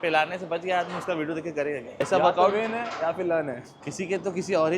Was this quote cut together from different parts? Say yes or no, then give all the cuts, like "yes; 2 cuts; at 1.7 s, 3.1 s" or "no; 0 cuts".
yes; 2 cuts; at 1.9 s, 3.7 s